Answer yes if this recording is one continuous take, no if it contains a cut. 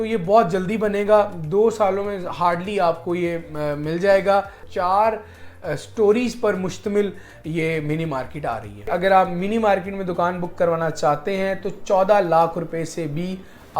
no